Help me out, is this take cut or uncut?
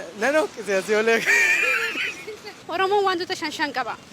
cut